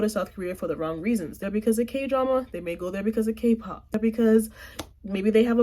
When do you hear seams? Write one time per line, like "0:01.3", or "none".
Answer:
0:01.4
0:04.0